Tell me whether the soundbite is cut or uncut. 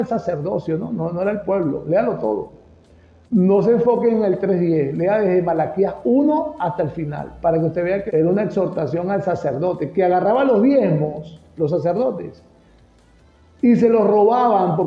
cut